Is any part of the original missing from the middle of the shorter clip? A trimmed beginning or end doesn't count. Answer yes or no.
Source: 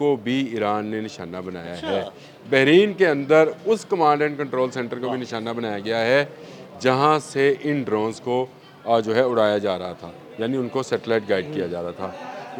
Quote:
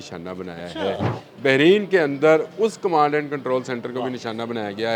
no